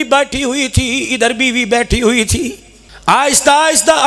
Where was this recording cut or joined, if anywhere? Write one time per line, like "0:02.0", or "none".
none